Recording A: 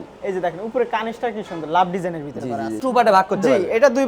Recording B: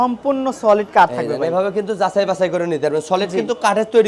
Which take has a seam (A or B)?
A